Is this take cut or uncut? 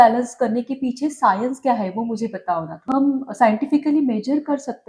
cut